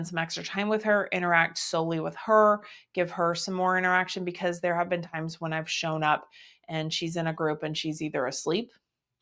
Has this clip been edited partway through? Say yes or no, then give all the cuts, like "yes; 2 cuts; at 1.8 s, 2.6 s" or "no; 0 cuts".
no; 0 cuts